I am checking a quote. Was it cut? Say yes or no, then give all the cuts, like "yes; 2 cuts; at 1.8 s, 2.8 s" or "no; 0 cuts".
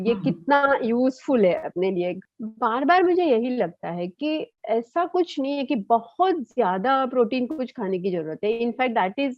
yes; 1 cut; at 2.2 s